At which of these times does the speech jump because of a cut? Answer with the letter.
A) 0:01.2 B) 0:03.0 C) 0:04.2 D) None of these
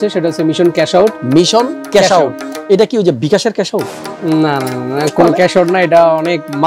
A